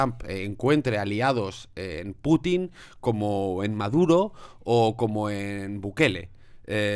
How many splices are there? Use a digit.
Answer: 0